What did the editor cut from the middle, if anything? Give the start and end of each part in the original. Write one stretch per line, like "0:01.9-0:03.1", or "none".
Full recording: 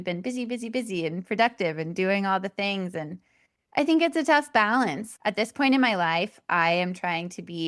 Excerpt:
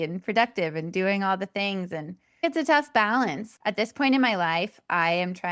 0:03.5-0:04.0